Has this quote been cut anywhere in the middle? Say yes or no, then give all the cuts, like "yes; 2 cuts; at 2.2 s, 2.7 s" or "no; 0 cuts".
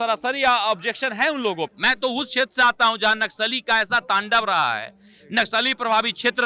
yes; 1 cut; at 1.8 s